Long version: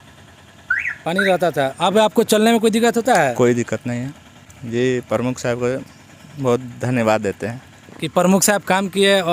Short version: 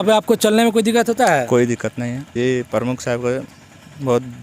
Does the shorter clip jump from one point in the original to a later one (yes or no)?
yes